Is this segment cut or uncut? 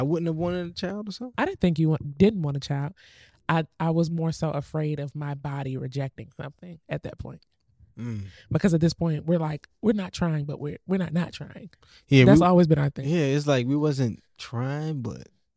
uncut